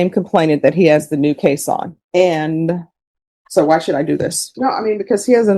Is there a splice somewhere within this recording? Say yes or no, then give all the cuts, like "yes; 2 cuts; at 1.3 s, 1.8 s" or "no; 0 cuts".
yes; 2 cuts; at 2.0 s, 4.4 s